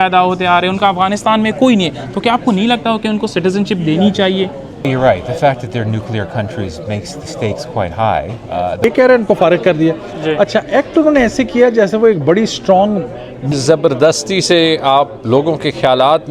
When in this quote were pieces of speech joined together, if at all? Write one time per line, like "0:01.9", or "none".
0:04.9
0:08.8
0:13.5